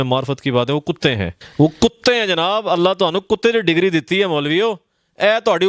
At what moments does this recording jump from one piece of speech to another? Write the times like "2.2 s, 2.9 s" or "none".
1.4 s